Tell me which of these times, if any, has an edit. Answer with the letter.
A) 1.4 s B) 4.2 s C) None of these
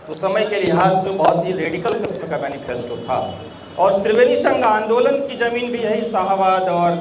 C